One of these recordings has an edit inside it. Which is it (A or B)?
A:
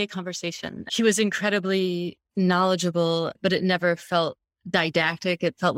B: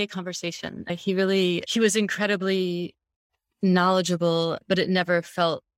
A